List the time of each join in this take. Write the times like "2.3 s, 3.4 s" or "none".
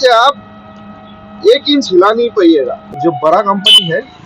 3.0 s